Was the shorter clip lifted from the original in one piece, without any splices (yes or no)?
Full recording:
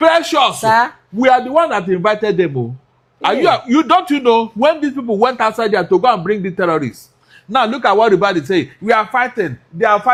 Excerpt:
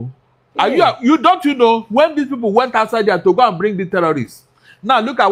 yes